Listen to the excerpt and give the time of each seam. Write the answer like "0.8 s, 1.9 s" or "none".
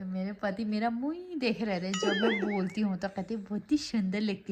none